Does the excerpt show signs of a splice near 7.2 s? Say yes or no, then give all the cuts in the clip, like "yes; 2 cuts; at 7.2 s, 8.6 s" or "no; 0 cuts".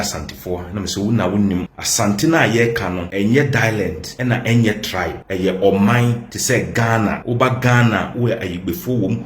yes; 6 cuts; at 1.8 s, 3.0 s, 4.1 s, 5.2 s, 6.3 s, 7.2 s